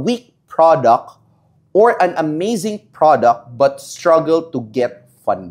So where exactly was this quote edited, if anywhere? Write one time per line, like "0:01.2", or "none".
none

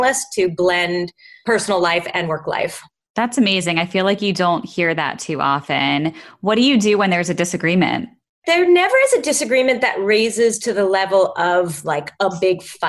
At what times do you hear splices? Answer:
none

